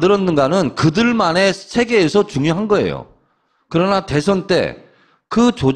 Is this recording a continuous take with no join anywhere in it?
yes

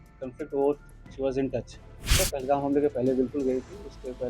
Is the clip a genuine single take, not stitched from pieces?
no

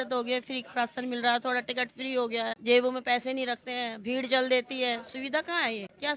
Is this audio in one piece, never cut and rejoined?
yes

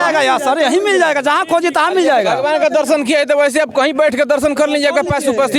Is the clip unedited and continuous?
yes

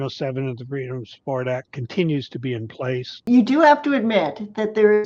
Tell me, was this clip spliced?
yes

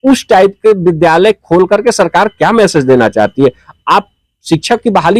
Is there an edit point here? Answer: no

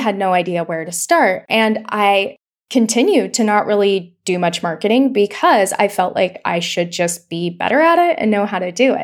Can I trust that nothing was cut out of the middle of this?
yes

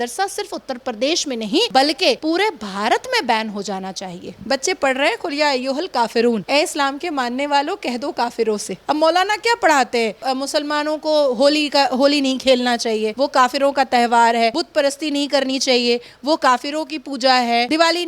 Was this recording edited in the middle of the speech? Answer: yes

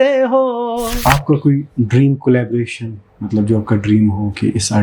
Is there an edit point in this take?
yes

